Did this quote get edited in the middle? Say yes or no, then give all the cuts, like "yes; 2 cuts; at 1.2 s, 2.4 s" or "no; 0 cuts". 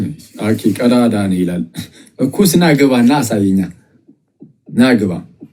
no; 0 cuts